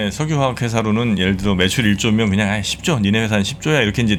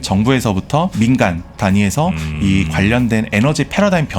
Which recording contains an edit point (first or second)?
second